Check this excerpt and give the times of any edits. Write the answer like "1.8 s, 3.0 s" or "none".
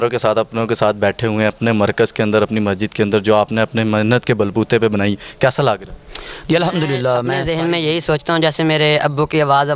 7.3 s